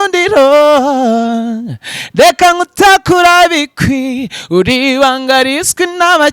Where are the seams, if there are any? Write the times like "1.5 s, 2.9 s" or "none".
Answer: none